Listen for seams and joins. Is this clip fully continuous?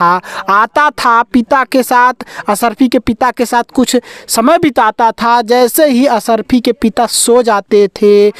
yes; 0 cuts

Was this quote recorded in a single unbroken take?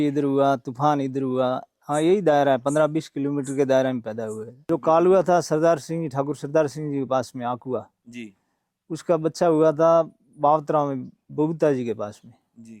no; 2 cuts; at 1.7 s, 4.5 s

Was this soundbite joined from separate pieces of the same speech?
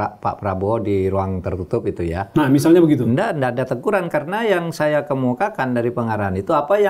no; 0 cuts

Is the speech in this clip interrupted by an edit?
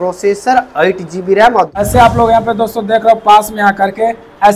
yes; 1 cut; at 1.8 s

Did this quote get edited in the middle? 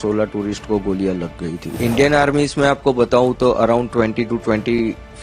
yes; 1 cut; at 1.7 s

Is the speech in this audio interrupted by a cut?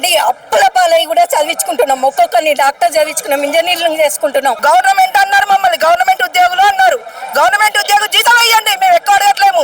yes; 1 cut; at 4.6 s

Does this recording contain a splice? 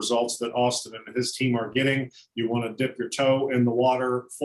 no; 0 cuts

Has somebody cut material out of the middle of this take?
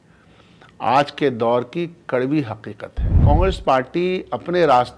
yes; 1 cut; at 3.2 s

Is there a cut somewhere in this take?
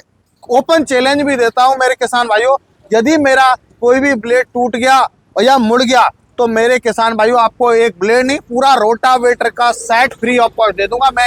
no; 0 cuts

